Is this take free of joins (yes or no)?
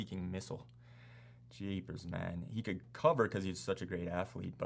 yes